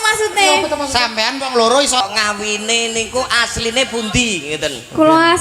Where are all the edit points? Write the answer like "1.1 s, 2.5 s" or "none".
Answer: 2.0 s